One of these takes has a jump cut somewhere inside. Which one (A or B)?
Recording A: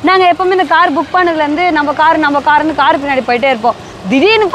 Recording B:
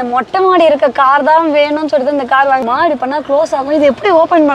B